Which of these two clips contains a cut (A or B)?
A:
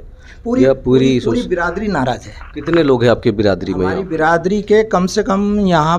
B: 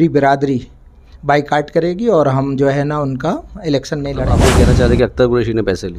B